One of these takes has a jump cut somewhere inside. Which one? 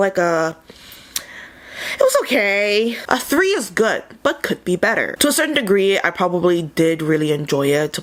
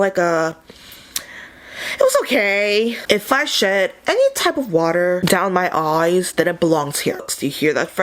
second; 2 cuts; at 3.0 s, 7.2 s

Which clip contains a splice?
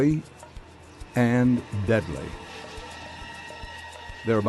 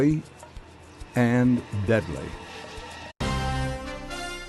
first; 1 cut; at 3.1 s

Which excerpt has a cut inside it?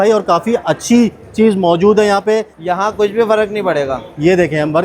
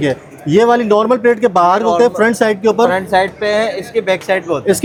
first; 1 cut; at 2.6 s

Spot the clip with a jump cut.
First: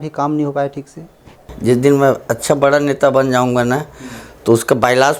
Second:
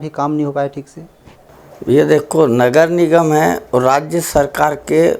first; 1 cut; at 1.5 s

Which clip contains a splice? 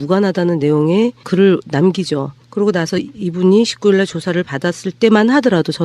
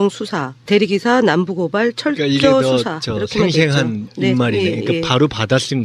first; 1 cut; at 3.7 s

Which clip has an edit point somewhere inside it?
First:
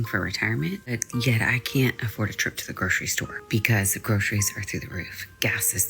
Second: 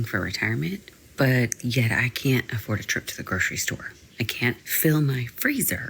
first; 2 cuts; at 1.0 s, 3.4 s

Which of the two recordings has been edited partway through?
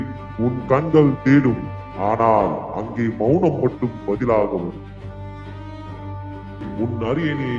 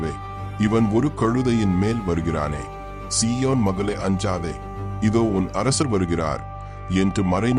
first; 1 cut; at 6.7 s

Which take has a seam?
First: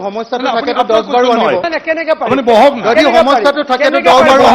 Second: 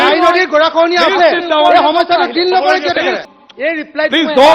second; 1 cut; at 3.3 s

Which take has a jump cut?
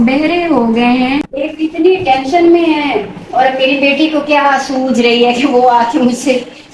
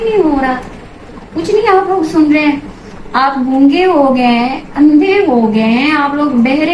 first; 1 cut; at 1.3 s

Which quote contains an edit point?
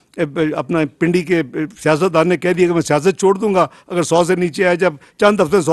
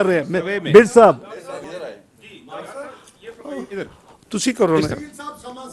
second; 1 cut; at 1.6 s

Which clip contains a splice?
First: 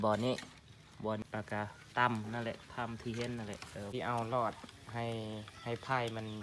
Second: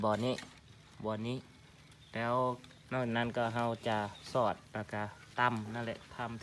first; 2 cuts; at 1.2 s, 3.9 s

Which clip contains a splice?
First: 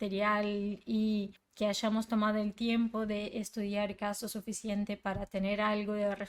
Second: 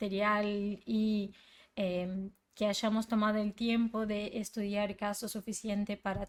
first; 1 cut; at 1.4 s

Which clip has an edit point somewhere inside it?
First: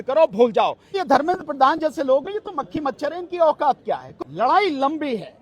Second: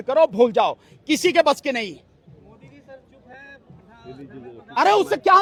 first; 2 cuts; at 1.0 s, 4.1 s

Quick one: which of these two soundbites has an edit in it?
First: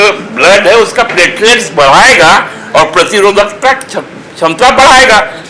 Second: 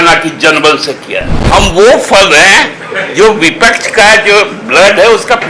second; 1 cut; at 1.4 s

